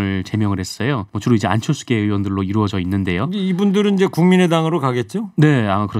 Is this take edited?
yes; 1 cut; at 1.1 s

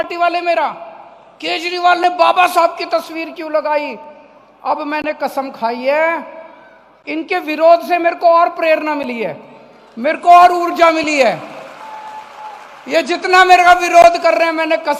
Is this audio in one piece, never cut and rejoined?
yes; 0 cuts

